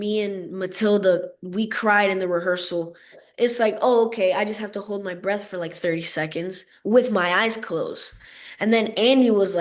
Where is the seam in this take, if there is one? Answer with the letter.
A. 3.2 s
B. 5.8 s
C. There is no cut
A